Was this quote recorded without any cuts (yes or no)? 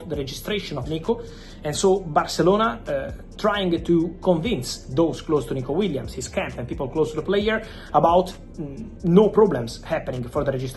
yes